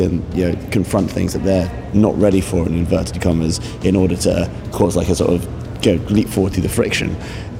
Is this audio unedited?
no; 1 cut; at 1.8 s

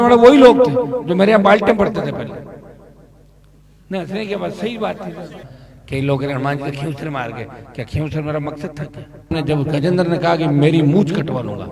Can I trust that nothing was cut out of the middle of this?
no; 2 cuts; at 5.4 s, 9.3 s

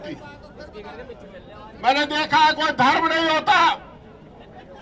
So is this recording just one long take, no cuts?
yes; 0 cuts

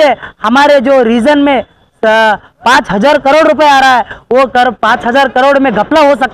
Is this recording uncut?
yes; 0 cuts

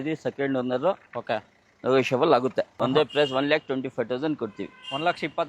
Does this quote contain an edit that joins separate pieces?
yes; 1 cut; at 2.7 s

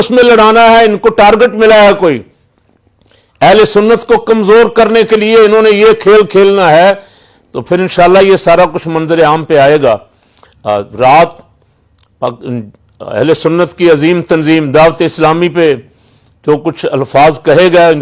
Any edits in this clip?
no; 0 cuts

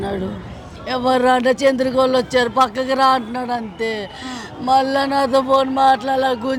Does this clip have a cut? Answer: no; 0 cuts

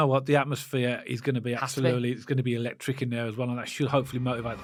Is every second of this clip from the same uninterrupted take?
yes; 0 cuts

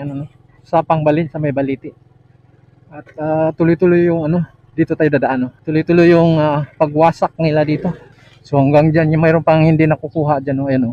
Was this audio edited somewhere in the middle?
yes; 2 cuts; at 5.6 s, 8.3 s

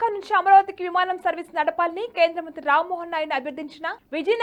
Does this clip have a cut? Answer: no; 0 cuts

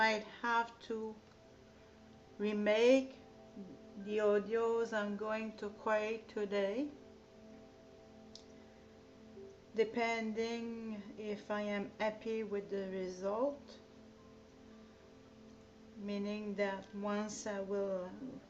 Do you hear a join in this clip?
yes; 1 cut; at 11.9 s

